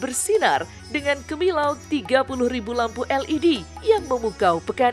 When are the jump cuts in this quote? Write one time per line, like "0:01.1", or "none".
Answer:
none